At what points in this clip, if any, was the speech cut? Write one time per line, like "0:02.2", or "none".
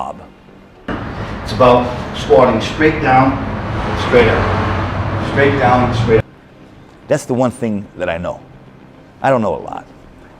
0:00.9
0:06.3

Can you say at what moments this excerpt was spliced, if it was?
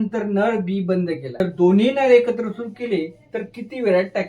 0:01.4

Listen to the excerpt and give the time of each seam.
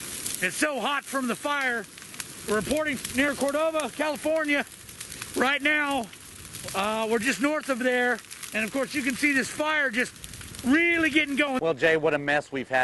0:11.6

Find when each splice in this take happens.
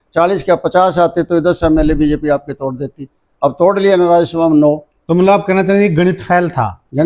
none

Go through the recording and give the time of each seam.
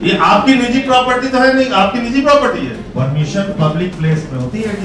0:02.8

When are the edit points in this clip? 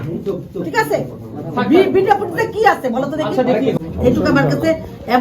0:03.8

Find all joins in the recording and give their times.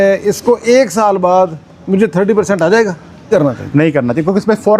0:03.3

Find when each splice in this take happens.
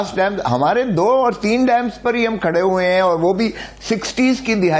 none

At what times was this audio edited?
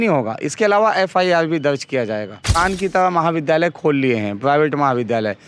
0:02.5

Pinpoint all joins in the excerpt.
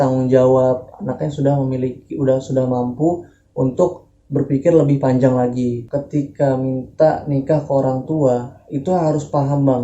0:05.8

